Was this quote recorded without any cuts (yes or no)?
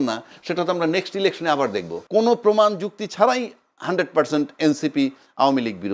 no